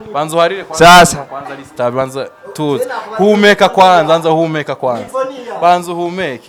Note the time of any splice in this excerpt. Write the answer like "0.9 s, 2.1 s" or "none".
none